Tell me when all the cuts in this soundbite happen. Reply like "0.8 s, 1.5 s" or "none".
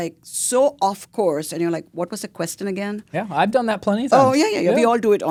none